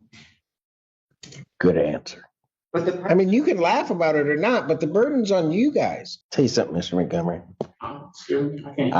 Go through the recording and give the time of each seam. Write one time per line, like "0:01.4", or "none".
0:02.6
0:06.1

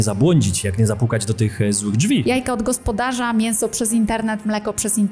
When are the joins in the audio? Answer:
0:02.2

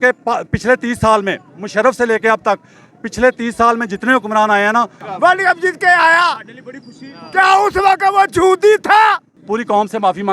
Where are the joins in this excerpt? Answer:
0:05.0
0:09.4

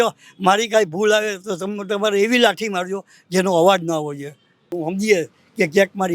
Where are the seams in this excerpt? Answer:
0:04.7

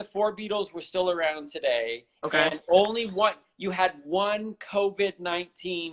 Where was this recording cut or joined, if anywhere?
none

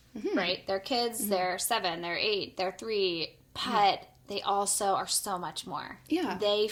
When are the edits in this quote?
none

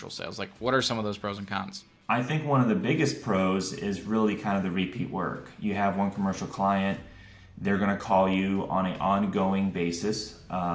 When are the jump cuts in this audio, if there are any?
0:01.9

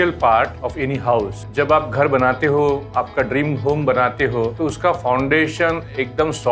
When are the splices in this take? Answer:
0:01.1
0:04.5

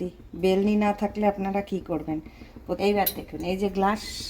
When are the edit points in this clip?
0:02.8

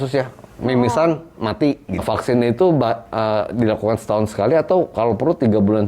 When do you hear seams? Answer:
0:02.0

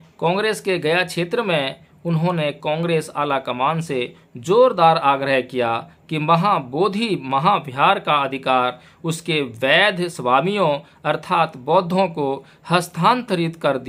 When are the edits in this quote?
none

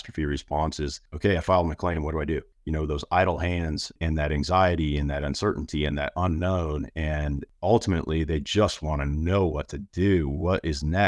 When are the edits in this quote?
0:01.0
0:02.6
0:03.9
0:07.5

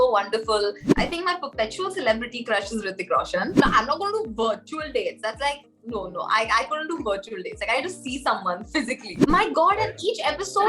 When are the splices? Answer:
0:00.9
0:03.6
0:09.1

